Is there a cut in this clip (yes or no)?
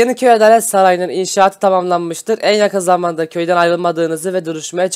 no